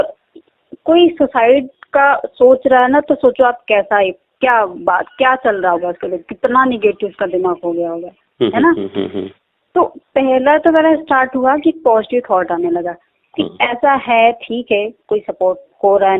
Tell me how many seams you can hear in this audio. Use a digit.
0